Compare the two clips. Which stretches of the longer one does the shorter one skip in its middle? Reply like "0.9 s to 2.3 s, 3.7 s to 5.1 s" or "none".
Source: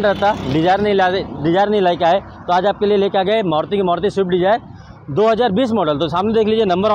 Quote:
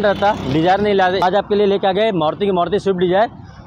1.2 s to 2.5 s